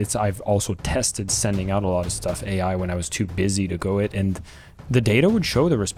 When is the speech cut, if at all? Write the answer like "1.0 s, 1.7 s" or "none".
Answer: none